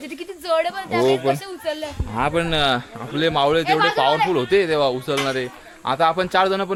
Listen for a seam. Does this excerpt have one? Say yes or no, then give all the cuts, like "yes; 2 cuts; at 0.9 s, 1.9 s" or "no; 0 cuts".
no; 0 cuts